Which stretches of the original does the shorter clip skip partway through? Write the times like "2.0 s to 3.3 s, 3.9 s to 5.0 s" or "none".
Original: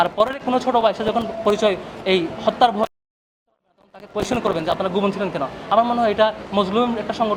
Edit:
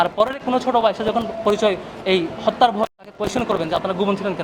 3.0 s to 4.0 s